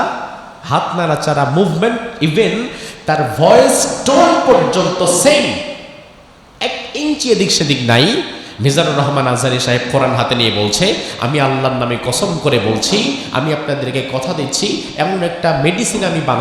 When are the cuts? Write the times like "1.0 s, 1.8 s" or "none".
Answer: none